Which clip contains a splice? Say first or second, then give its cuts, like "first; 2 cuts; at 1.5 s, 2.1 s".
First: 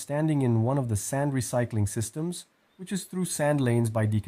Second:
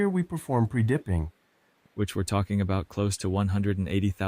second; 1 cut; at 1.4 s